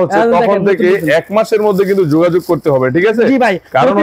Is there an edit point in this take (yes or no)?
no